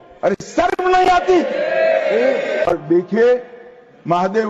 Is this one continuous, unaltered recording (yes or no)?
no